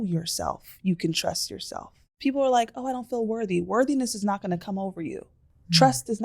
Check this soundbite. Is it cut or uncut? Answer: cut